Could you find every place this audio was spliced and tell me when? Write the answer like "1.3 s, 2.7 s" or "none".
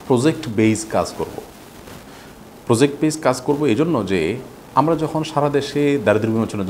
none